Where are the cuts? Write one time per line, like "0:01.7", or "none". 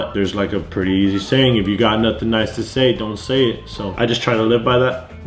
none